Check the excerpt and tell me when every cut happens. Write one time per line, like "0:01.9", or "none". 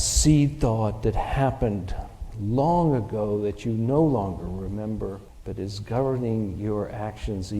0:05.3